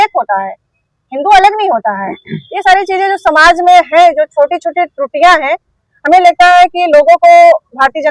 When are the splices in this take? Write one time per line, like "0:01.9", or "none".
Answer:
none